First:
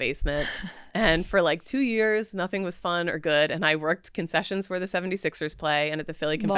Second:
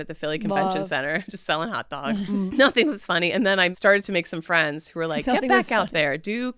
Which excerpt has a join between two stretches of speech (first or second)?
second